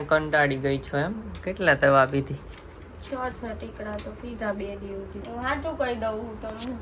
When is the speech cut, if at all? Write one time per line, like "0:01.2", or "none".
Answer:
0:05.2